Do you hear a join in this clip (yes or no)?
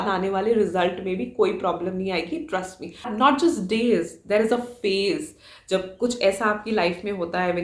yes